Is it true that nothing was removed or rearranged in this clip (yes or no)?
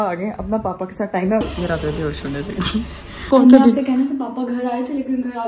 no